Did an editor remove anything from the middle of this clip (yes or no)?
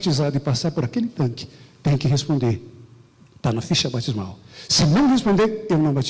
no